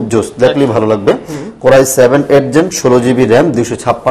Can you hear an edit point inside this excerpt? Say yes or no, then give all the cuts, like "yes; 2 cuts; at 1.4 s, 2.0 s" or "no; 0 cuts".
no; 0 cuts